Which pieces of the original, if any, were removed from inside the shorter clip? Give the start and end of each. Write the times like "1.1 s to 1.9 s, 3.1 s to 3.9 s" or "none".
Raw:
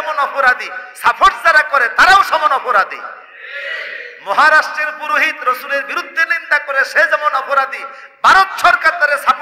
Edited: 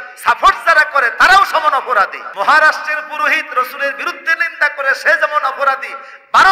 3.0 s to 4.1 s